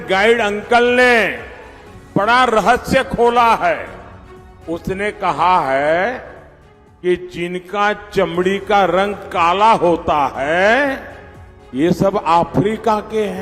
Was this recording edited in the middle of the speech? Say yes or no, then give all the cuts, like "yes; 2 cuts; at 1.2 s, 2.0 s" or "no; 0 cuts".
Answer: no; 0 cuts